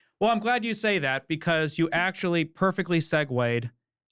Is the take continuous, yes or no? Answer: yes